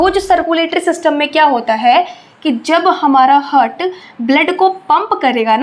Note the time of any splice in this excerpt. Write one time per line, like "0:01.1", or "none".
none